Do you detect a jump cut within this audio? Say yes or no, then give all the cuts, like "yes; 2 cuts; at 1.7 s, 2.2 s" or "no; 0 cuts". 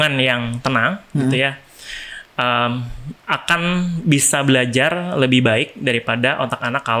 no; 0 cuts